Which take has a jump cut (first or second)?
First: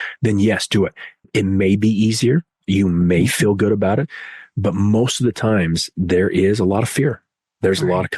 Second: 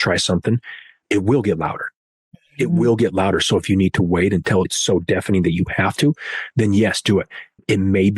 second